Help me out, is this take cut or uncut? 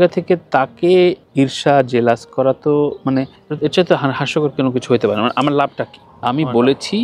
cut